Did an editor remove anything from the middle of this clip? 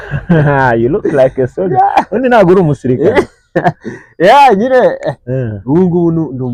no; 0 cuts

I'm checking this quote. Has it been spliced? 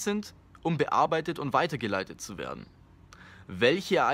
no; 0 cuts

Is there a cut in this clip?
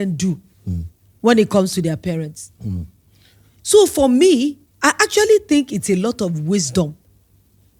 no; 0 cuts

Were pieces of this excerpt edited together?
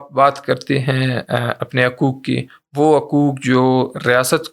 no; 0 cuts

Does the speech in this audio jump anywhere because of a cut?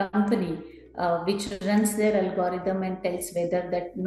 no; 0 cuts

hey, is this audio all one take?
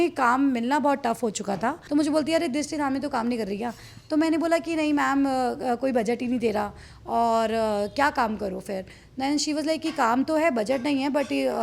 no; 1 cut; at 1.8 s

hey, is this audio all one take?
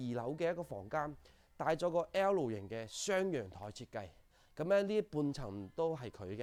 yes; 0 cuts

